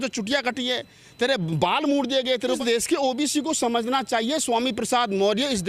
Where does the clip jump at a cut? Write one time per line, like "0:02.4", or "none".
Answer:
0:02.6